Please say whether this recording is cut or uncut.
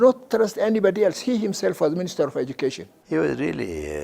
cut